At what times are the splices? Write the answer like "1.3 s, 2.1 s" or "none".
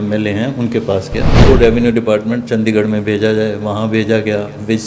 1.4 s